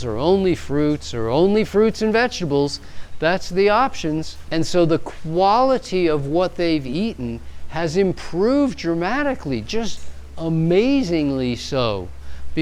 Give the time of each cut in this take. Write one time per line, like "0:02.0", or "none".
0:04.4